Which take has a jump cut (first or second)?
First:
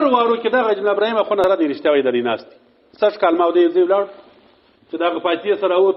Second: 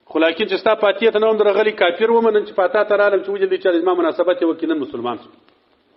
first